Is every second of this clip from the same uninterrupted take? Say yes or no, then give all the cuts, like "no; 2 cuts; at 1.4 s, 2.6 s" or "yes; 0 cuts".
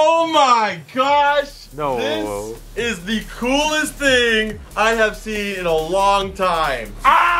no; 2 cuts; at 1.6 s, 2.6 s